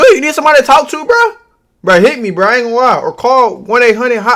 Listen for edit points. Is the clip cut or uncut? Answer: uncut